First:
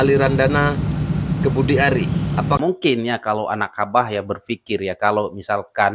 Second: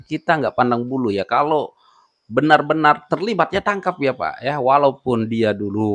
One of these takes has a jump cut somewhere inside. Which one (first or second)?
first